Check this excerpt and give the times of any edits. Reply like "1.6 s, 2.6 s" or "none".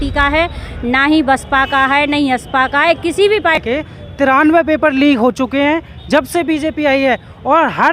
3.6 s